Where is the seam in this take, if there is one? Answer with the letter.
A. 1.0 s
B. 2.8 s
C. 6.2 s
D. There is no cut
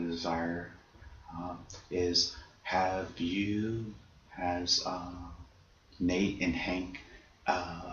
C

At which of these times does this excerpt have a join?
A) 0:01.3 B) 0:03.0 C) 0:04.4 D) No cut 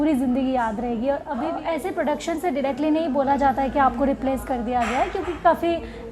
A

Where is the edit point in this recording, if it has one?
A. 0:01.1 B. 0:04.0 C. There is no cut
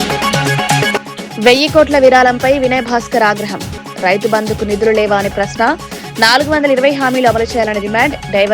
A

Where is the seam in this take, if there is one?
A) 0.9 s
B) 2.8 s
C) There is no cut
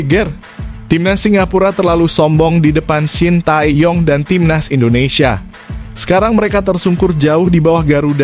C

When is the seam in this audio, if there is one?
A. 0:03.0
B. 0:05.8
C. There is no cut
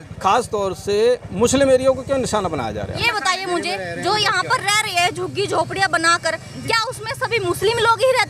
A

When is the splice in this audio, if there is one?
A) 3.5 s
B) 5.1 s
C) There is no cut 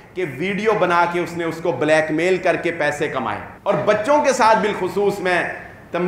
A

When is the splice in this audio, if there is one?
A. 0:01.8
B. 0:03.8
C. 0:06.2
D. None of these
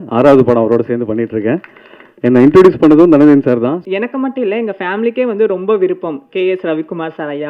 B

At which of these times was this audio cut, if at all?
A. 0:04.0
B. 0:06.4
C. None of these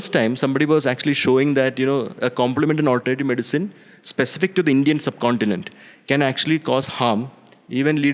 C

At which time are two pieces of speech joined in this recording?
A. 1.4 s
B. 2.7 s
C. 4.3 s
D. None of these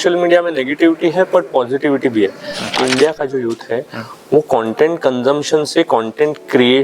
B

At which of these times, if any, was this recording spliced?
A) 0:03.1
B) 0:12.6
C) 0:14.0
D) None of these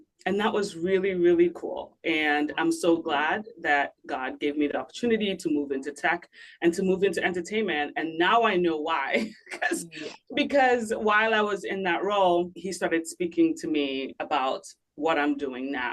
B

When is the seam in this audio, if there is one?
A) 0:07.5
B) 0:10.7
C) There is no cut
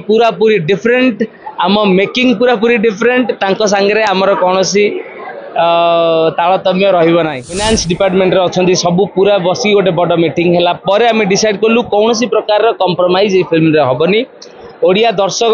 A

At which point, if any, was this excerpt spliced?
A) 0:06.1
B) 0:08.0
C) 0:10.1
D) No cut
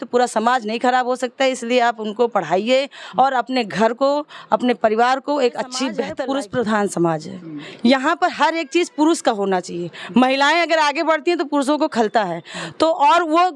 A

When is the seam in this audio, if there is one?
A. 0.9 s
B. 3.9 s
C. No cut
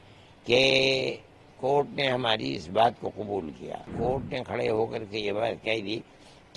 B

